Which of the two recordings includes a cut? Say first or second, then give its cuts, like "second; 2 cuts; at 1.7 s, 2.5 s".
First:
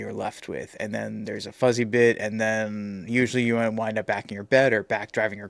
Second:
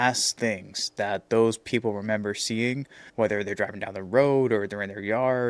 second; 1 cut; at 3.0 s